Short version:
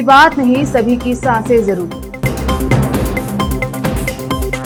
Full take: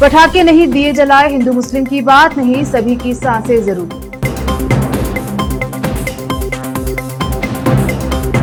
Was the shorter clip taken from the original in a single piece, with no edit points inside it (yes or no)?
yes